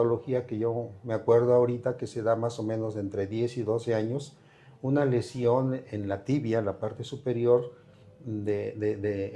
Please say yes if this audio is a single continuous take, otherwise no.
yes